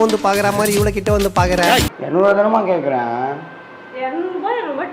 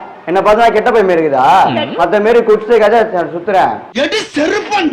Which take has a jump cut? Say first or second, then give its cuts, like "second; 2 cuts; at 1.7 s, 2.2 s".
first; 1 cut; at 2.0 s